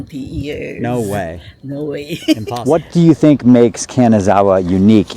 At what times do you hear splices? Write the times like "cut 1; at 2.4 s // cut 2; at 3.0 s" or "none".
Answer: cut 1; at 2.5 s